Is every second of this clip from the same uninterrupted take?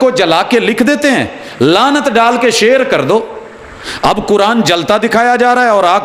yes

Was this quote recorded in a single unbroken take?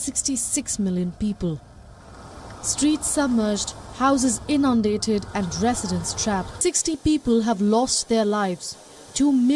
no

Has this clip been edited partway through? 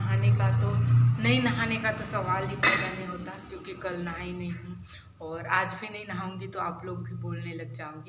no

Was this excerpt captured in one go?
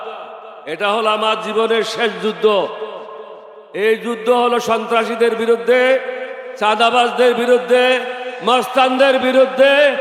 yes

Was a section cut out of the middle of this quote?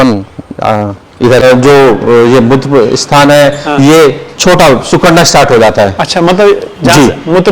yes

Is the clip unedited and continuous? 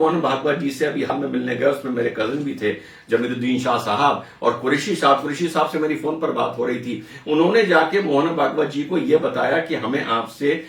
no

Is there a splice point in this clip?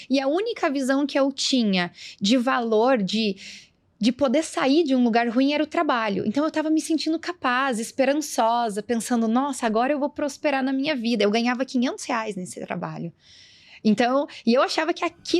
no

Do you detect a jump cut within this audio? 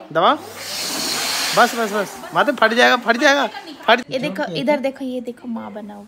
yes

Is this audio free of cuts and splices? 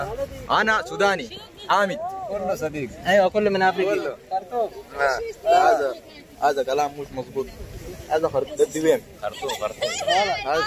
no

